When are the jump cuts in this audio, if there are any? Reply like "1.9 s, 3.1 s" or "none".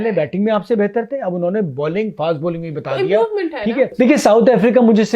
3.9 s